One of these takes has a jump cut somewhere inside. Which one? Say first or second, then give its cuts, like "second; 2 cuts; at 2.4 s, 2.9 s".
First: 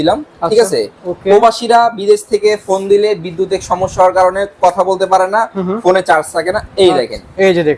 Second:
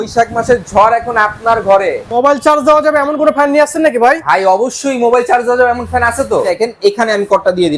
second; 2 cuts; at 2.1 s, 6.5 s